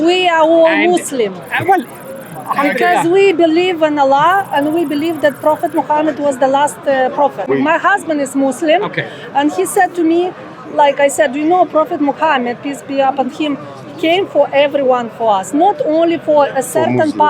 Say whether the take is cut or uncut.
cut